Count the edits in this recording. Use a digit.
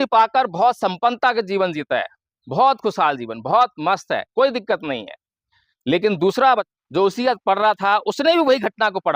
1